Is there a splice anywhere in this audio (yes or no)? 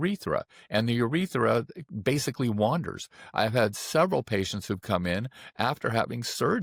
no